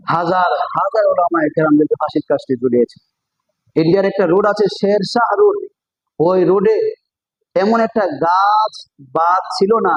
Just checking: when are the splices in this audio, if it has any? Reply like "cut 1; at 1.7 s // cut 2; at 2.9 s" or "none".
none